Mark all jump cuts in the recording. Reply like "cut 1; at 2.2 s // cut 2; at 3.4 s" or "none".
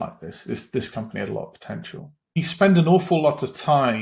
cut 1; at 2.4 s

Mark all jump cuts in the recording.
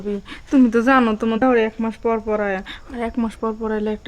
cut 1; at 1.4 s

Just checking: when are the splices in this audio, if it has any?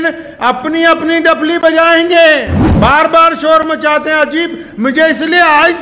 cut 1; at 2.6 s

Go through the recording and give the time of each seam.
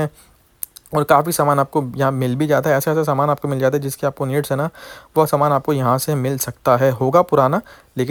none

